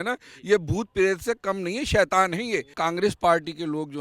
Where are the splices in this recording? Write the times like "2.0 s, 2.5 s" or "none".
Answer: 2.8 s